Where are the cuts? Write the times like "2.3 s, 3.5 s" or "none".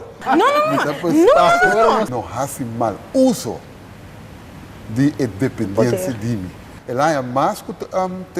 2.1 s